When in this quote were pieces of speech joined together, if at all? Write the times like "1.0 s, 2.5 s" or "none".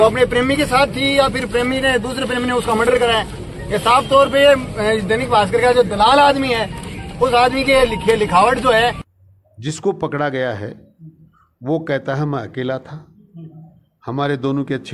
9.0 s